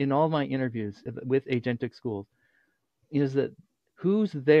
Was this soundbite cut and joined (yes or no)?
yes